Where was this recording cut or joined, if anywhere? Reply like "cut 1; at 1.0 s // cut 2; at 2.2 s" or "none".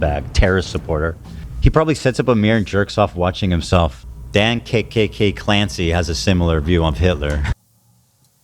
none